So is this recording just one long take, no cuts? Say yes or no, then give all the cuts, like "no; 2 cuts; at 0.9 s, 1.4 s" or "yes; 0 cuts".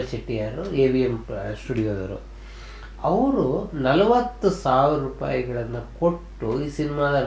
yes; 0 cuts